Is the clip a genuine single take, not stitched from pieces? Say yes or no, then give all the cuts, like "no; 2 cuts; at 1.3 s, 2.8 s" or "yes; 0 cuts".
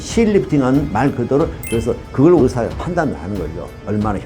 no; 1 cut; at 1.6 s